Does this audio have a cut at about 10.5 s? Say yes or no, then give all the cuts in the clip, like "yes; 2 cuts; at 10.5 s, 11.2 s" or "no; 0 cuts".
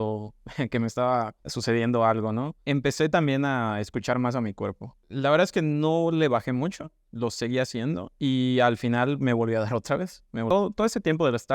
yes; 2 cuts; at 5.0 s, 10.5 s